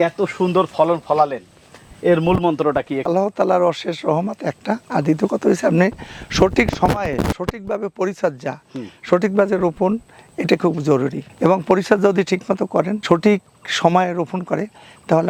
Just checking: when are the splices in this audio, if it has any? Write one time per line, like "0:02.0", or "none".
none